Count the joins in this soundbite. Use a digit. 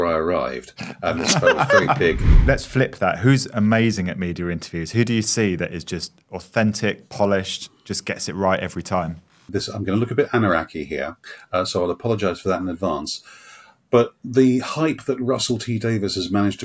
2